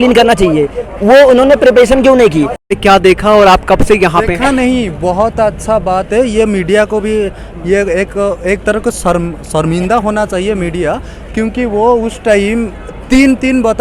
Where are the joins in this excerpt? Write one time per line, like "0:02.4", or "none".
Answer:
0:02.6